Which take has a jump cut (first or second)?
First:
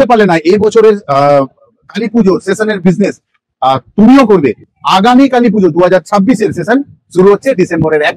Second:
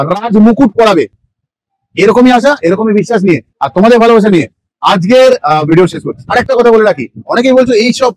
second